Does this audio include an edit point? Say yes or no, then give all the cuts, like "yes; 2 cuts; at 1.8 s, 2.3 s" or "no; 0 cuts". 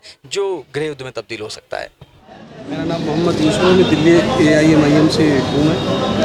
no; 0 cuts